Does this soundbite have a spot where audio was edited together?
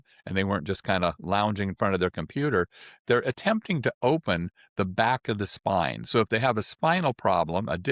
no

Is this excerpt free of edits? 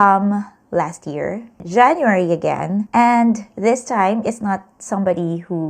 yes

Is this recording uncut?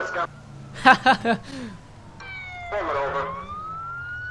yes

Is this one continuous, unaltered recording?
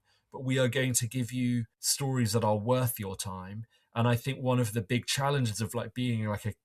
no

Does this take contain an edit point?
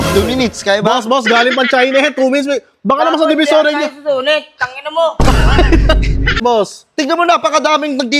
yes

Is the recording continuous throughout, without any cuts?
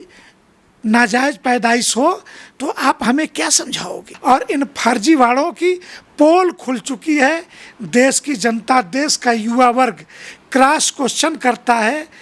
no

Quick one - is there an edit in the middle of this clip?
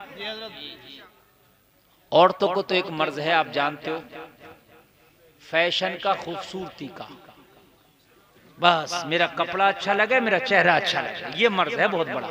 yes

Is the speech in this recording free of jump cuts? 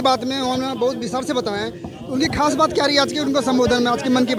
yes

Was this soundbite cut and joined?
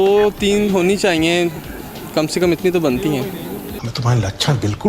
no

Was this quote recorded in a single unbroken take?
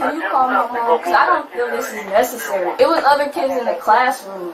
yes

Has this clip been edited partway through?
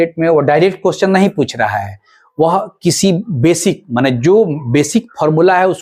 no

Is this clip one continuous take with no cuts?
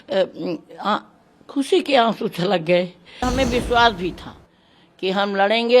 no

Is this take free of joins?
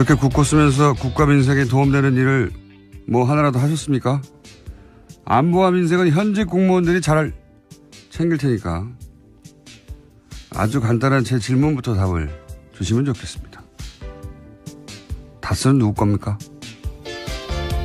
yes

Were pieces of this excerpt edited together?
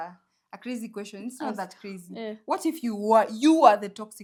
no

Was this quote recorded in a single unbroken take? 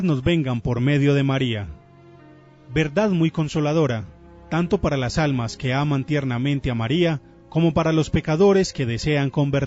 yes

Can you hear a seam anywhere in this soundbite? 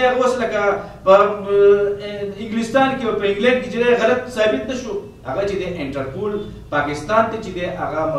yes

